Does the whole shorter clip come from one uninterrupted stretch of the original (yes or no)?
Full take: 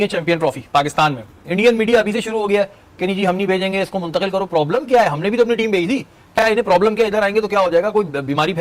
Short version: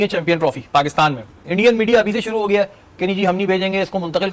yes